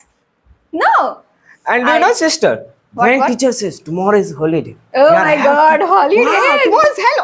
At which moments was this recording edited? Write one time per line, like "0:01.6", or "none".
none